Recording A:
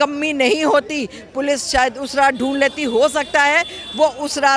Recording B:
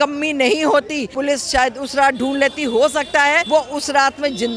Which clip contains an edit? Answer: B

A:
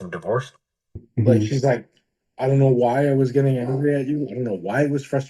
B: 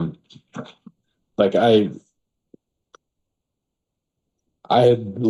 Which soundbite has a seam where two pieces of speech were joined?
A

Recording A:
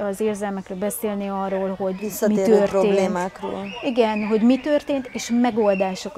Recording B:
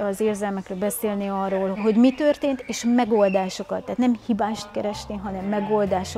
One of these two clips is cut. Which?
B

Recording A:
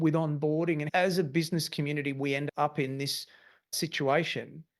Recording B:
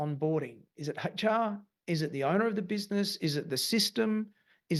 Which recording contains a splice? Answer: A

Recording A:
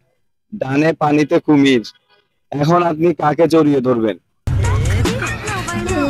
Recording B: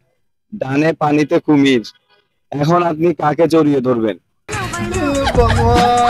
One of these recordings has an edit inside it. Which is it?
B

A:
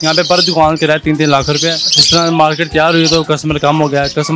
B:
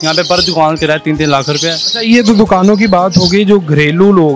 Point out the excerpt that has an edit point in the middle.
A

